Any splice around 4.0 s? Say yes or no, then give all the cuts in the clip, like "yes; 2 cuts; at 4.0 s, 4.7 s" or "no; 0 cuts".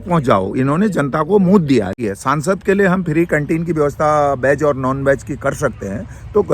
no; 1 cut; at 1.9 s